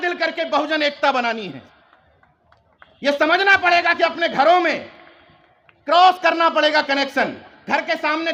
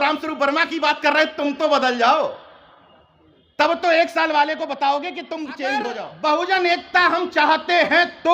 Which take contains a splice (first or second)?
second